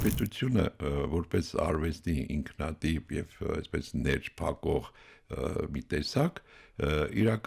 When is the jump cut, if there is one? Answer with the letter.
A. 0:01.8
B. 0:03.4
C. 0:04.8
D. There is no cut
D